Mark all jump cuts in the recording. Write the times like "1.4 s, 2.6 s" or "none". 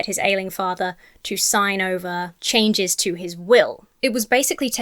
2.4 s, 3.8 s